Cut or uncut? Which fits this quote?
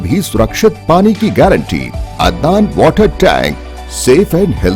cut